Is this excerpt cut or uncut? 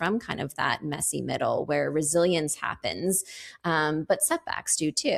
uncut